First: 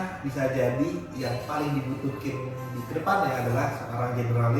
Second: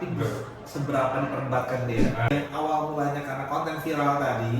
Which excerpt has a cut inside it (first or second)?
second